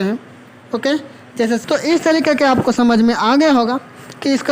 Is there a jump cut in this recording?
yes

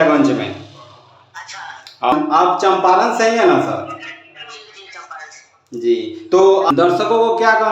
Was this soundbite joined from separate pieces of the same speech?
yes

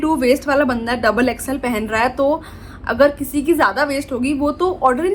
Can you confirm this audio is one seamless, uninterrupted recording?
yes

